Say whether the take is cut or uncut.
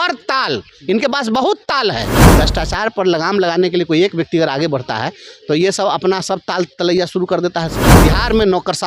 cut